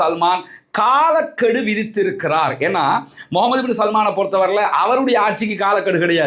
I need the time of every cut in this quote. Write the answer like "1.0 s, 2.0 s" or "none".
none